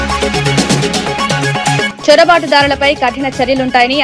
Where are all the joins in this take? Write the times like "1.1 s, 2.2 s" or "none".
1.8 s